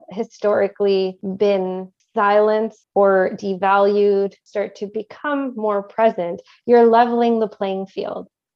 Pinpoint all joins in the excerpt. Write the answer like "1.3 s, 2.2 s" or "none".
1.6 s, 2.8 s, 4.4 s